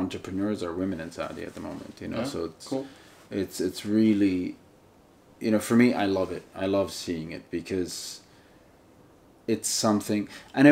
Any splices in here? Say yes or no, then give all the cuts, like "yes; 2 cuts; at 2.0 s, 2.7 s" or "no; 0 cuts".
no; 0 cuts